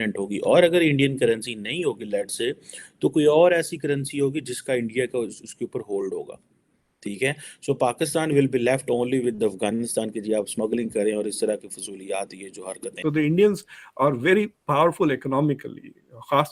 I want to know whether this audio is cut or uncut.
cut